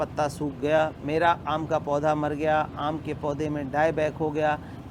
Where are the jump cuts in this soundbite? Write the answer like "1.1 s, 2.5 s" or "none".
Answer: none

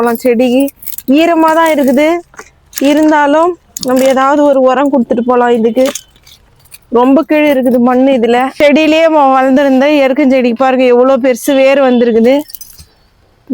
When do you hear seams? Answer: 8.5 s

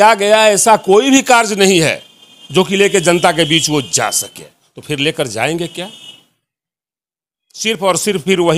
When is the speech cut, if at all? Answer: none

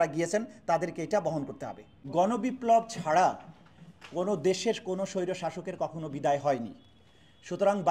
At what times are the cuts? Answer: none

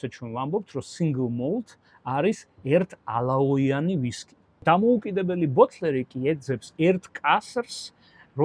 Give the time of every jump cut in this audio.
4.4 s

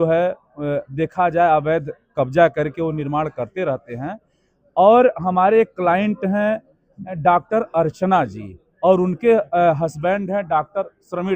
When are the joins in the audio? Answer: none

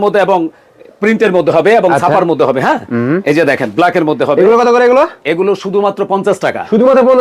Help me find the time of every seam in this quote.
none

